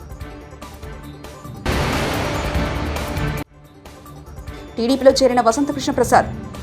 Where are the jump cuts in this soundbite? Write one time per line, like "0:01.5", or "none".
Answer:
0:04.4